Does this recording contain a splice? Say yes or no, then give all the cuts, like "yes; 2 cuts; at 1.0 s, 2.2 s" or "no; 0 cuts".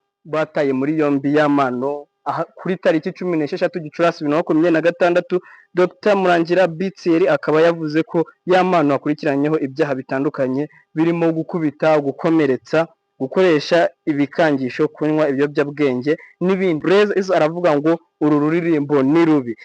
yes; 1 cut; at 16.8 s